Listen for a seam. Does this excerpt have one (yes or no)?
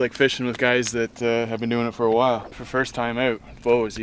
yes